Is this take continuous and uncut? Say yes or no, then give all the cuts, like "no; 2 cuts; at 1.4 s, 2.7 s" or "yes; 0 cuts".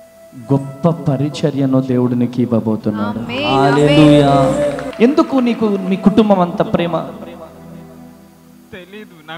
no; 1 cut; at 4.8 s